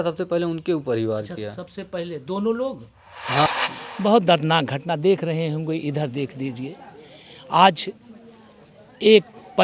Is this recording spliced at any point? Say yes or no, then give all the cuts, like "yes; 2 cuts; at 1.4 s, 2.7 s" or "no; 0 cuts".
yes; 1 cut; at 3.5 s